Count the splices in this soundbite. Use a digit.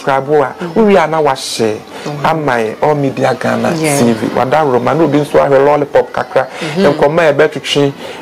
0